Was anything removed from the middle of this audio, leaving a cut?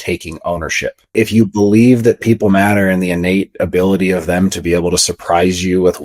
yes; 1 cut; at 1.1 s

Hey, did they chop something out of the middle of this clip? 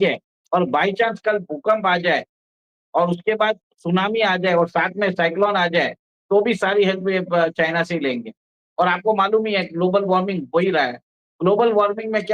no; 0 cuts

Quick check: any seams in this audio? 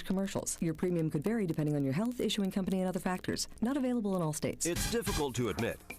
yes; 1 cut; at 4.6 s

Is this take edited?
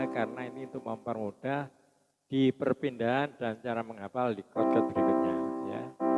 no; 0 cuts

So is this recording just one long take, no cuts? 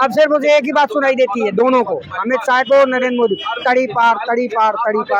yes; 0 cuts

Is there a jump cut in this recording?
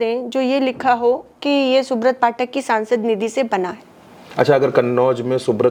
no; 0 cuts

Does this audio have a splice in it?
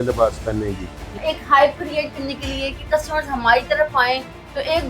yes; 1 cut; at 1.2 s

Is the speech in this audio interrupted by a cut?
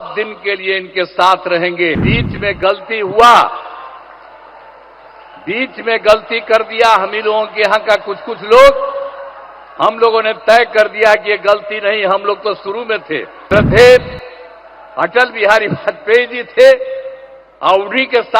yes; 2 cuts; at 2.0 s, 13.3 s

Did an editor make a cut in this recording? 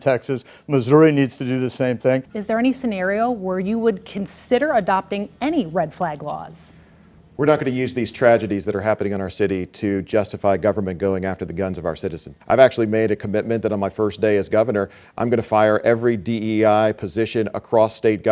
yes; 2 cuts; at 2.3 s, 12.3 s

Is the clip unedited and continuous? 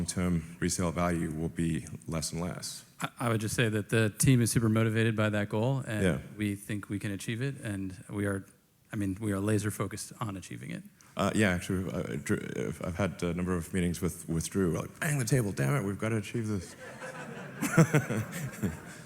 no; 1 cut; at 2.9 s

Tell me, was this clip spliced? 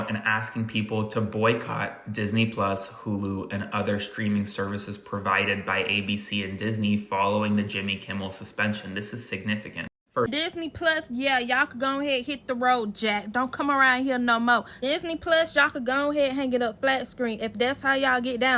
yes; 1 cut; at 10.3 s

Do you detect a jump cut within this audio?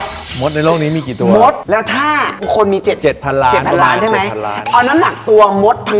yes; 1 cut; at 1.6 s

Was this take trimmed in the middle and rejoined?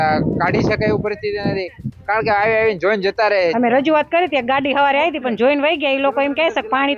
yes; 1 cut; at 3.5 s

